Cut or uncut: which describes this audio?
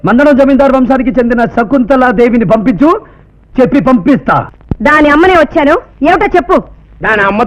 cut